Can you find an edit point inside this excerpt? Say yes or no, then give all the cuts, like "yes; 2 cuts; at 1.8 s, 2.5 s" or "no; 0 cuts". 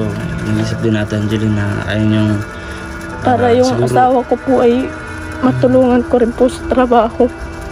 no; 0 cuts